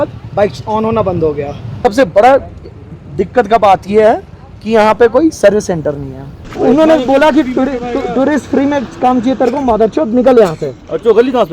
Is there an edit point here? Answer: yes; 2 cuts; at 1.7 s, 6.4 s

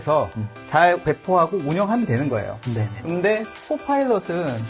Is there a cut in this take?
yes; 1 cut; at 1.0 s

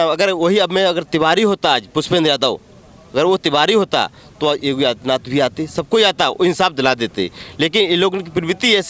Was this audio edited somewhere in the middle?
no; 0 cuts

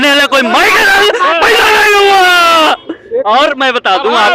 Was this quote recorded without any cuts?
yes; 0 cuts

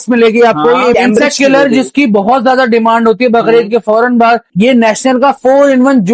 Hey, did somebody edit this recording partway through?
yes; 2 cuts; at 0.9 s, 4.5 s

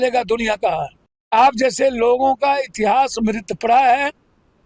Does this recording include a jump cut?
yes; 1 cut; at 1.3 s

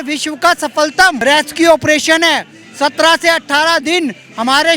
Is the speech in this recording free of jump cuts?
no; 1 cut; at 1.2 s

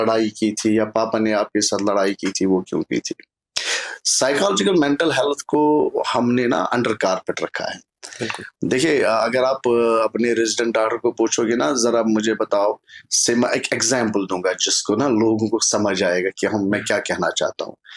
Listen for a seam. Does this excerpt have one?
no; 0 cuts

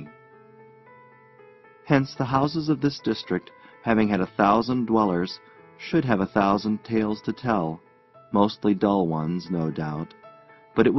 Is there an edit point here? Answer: yes; 1 cut; at 1.7 s

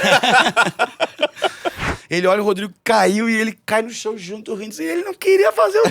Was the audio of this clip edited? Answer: yes; 1 cut; at 1.8 s

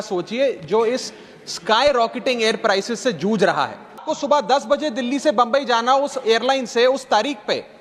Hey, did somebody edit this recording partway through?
yes; 1 cut; at 4.1 s

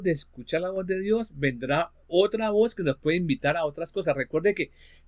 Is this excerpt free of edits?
yes; 0 cuts

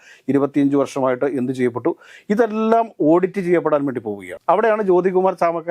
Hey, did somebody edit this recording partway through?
no; 0 cuts

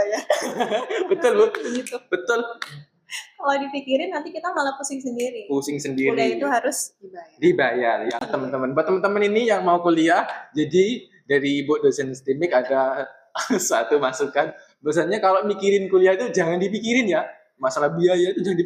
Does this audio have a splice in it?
no; 0 cuts

